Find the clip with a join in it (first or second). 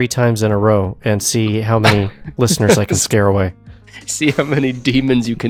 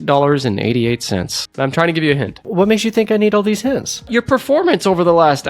second